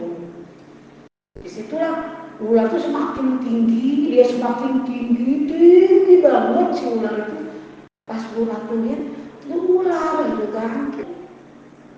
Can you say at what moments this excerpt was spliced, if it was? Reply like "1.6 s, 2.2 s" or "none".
11.0 s